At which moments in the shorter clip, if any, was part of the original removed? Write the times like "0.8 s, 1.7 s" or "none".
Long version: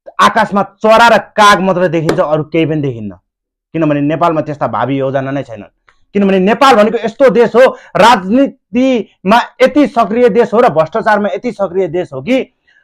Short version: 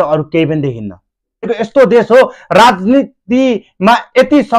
1.5 s